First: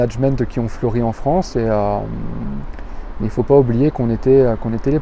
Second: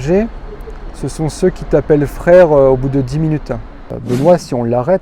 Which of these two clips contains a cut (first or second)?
second